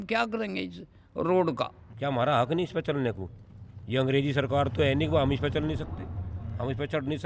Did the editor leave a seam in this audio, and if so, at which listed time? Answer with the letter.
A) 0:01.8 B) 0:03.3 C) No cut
A